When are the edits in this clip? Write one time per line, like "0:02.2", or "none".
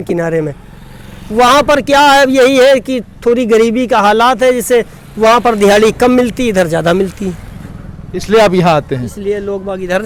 none